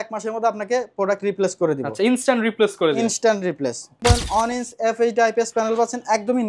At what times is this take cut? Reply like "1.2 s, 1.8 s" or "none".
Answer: 3.9 s